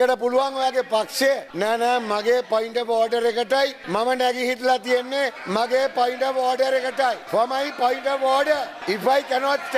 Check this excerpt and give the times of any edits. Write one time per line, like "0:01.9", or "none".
0:01.5
0:03.8
0:05.4
0:07.2
0:08.7

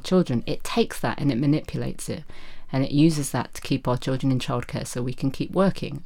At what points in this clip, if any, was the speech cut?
none

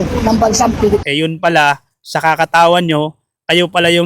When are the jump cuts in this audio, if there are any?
0:01.0

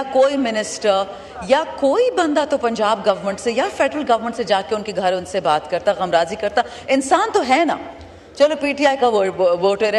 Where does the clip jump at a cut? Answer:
none

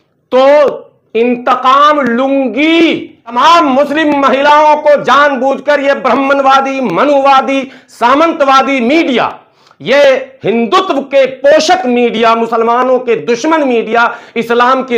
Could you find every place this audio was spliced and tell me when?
0:03.2

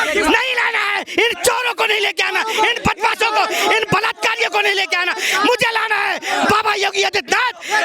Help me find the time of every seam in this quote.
none

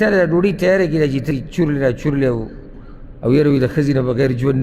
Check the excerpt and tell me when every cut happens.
0:01.3

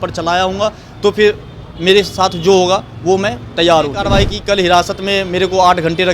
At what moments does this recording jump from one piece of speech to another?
0:04.1

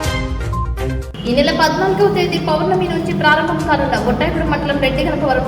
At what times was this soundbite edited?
0:01.0

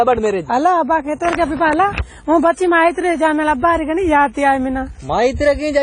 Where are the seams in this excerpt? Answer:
0:02.0

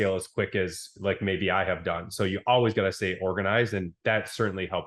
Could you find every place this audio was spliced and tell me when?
none

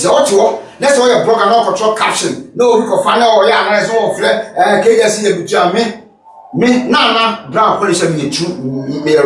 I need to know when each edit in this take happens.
none

